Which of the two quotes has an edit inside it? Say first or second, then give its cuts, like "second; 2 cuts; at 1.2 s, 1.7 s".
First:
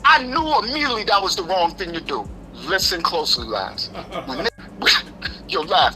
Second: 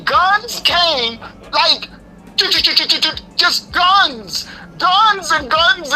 first; 1 cut; at 4.5 s